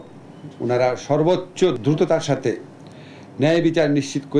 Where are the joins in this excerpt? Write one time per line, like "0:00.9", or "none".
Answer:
0:01.8